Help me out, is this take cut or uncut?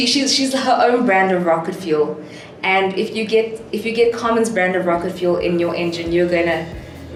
uncut